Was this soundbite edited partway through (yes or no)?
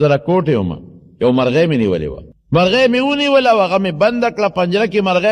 yes